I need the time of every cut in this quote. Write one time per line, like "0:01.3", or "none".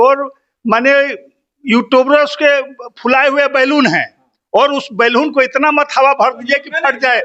none

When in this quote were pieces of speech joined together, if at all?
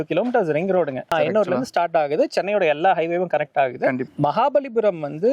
0:01.1
0:04.1

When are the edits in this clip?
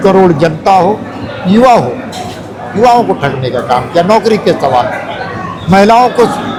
none

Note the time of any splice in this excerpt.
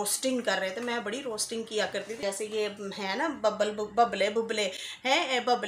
0:02.1

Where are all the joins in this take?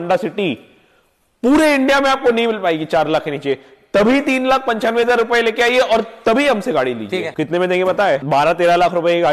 0:07.4
0:08.2

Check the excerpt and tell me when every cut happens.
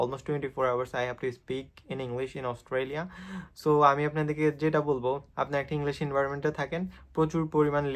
none

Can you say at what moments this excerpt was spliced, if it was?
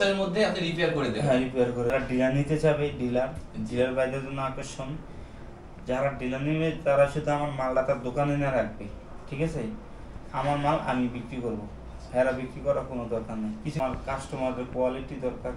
0:01.9
0:13.8

